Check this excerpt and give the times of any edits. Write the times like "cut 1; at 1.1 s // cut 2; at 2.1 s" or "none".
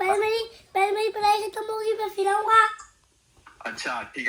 none